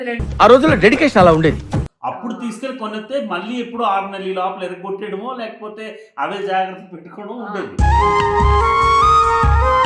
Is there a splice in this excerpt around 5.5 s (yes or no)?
no